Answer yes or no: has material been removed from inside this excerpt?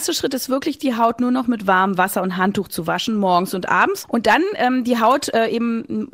yes